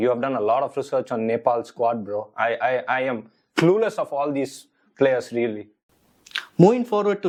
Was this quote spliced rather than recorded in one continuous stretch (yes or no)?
no